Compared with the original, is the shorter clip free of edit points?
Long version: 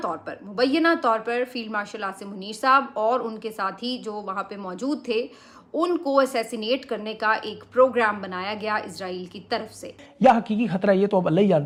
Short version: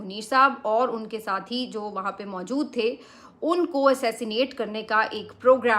yes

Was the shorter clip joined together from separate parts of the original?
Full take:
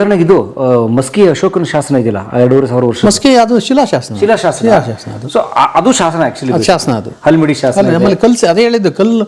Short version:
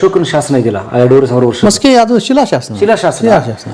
no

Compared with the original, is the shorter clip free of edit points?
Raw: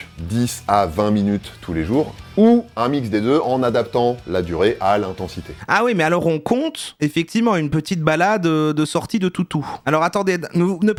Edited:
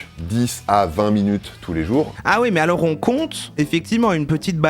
no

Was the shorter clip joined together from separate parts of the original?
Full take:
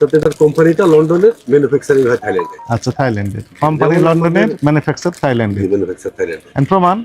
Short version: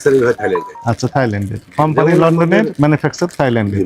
no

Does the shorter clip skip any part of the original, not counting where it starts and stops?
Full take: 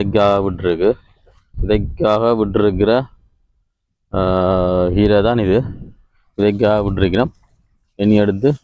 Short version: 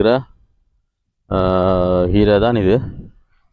no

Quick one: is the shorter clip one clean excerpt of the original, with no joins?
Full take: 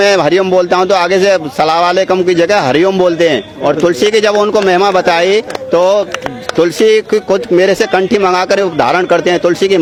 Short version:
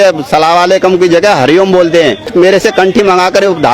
no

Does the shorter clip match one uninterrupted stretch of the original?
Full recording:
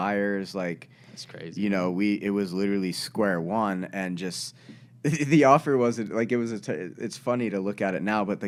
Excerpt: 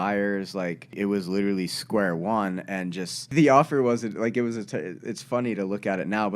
no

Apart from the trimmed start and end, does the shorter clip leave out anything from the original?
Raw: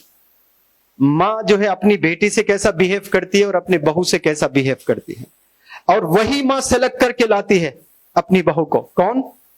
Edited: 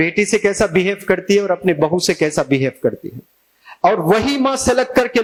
no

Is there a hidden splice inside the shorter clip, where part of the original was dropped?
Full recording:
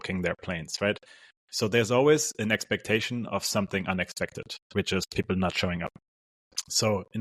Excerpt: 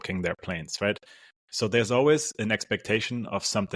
no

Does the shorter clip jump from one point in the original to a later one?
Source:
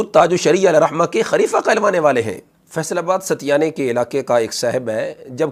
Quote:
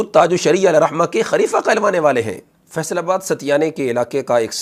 no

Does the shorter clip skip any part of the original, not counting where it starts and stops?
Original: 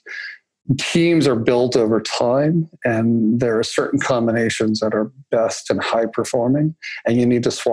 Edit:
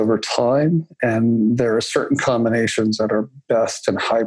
no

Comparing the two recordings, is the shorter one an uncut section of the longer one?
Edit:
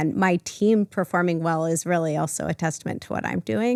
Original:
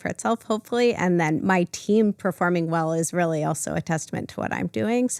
yes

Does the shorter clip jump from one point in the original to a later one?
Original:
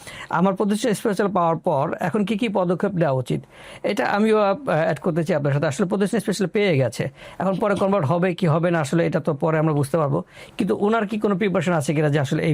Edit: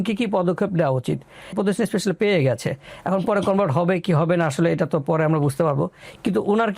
yes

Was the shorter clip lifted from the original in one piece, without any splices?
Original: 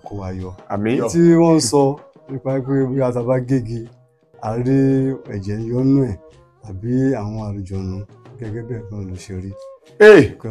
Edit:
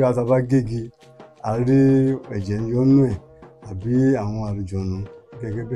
yes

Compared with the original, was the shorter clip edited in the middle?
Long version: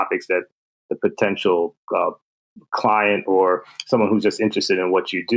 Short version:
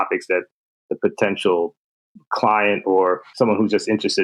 yes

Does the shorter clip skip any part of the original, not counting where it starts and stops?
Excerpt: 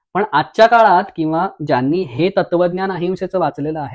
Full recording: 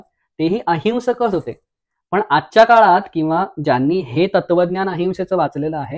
no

